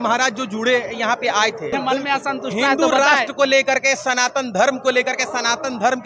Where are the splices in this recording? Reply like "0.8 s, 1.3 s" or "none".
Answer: 1.7 s